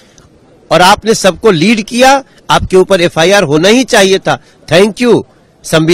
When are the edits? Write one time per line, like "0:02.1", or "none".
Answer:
none